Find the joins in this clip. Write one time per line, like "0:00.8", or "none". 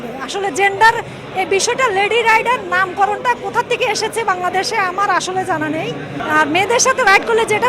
0:06.2